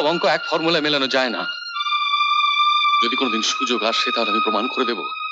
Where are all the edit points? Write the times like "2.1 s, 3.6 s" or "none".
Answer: none